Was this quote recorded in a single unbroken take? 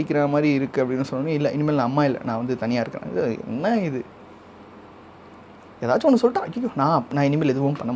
yes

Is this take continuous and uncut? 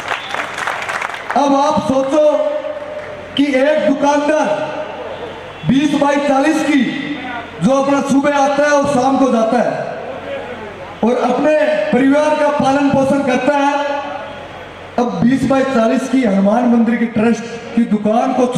no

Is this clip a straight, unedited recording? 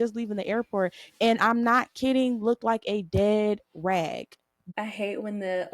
no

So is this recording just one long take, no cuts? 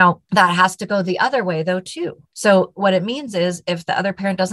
no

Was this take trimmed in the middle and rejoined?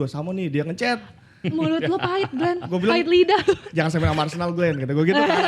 no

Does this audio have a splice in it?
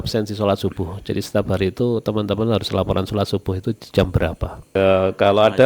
yes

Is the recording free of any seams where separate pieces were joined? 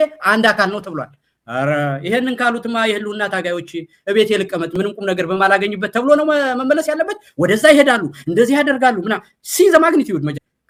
yes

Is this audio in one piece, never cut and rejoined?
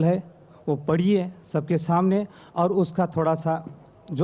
yes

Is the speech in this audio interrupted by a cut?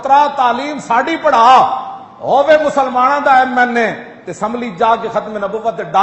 no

